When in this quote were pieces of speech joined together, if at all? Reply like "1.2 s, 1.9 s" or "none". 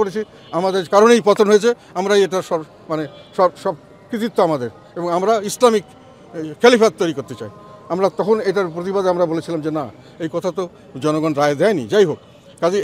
none